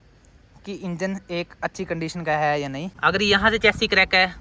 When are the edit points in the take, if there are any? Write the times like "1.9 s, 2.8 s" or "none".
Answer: 2.9 s